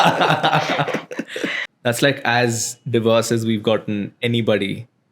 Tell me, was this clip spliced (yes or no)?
yes